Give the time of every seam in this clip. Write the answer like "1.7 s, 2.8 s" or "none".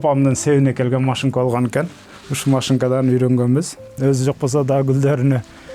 3.9 s